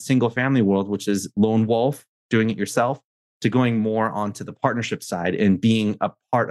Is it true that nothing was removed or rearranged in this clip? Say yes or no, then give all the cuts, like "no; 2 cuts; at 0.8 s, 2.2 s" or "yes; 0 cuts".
yes; 0 cuts